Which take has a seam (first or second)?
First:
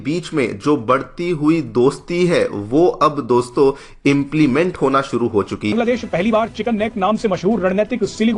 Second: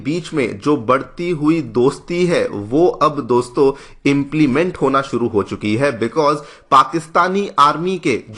first